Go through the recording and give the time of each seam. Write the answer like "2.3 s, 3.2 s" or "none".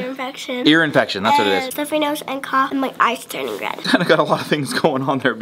1.7 s, 2.7 s, 3.8 s